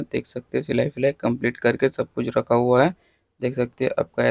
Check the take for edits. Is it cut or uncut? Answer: uncut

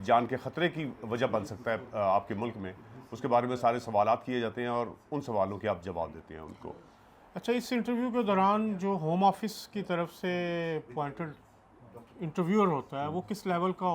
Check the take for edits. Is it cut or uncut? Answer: uncut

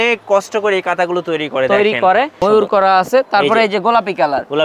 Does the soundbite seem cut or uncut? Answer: cut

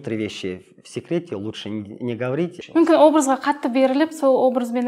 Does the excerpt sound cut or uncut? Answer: cut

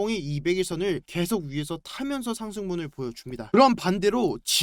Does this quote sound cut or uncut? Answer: uncut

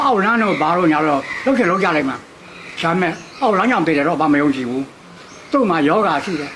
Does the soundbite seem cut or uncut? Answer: uncut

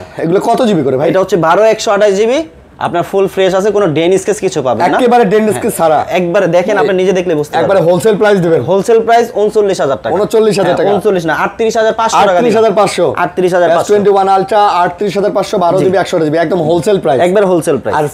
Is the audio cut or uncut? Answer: uncut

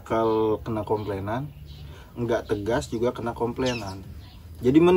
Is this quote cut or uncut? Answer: uncut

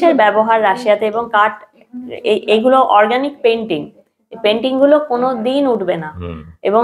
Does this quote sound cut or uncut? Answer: uncut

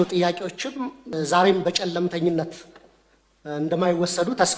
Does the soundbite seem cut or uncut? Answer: cut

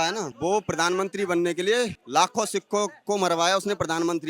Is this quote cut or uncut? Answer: cut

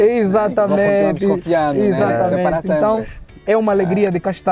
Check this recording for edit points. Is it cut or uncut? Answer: uncut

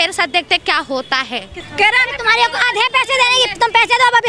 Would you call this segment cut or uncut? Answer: cut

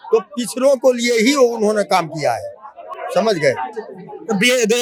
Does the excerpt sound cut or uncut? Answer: uncut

